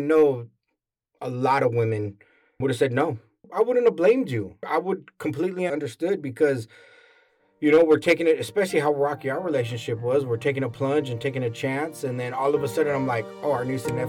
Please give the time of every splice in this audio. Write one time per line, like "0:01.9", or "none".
0:03.5
0:04.7
0:05.7